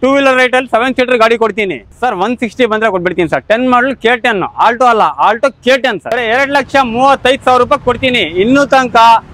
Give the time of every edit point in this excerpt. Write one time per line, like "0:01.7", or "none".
0:01.8
0:06.2